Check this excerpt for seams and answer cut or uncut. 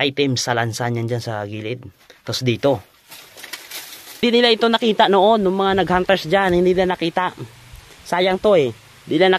cut